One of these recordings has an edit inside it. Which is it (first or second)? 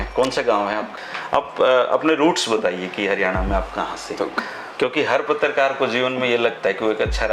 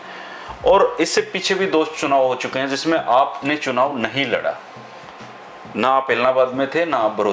first